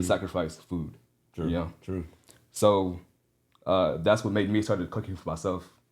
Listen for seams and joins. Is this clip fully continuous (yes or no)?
yes